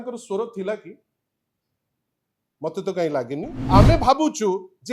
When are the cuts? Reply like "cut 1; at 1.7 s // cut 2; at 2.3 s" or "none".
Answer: cut 1; at 3.6 s